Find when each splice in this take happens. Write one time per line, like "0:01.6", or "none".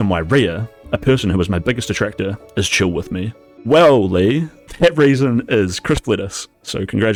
none